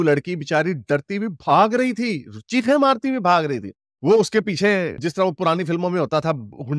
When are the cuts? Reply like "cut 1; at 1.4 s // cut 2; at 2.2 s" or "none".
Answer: none